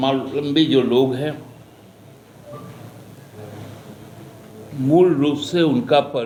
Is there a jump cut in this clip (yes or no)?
no